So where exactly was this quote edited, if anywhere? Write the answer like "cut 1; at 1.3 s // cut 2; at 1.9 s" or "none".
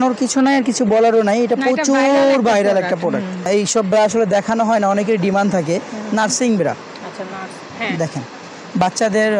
cut 1; at 3.3 s

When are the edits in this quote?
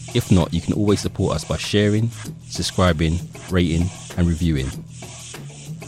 cut 1; at 4.7 s

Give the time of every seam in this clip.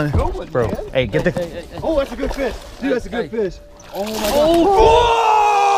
none

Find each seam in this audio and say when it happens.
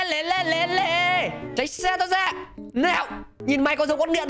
cut 1; at 1.5 s // cut 2; at 3.2 s

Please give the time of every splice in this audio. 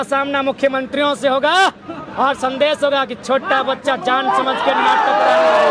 none

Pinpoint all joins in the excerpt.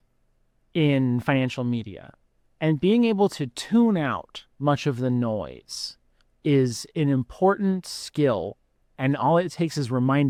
none

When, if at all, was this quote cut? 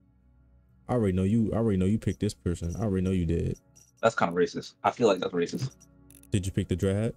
none

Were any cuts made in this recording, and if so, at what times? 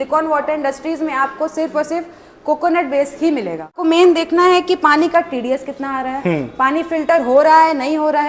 cut 1; at 3.8 s

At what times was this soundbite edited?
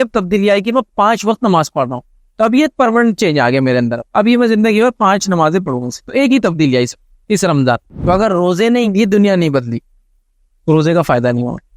cut 1; at 7.9 s // cut 2; at 8.9 s

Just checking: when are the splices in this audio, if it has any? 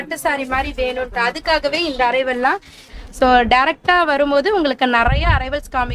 cut 1; at 2.9 s

